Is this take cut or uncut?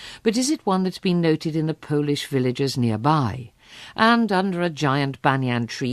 cut